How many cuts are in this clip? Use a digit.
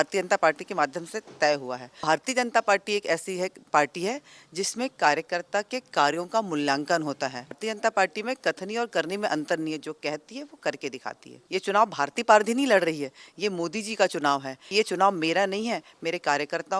4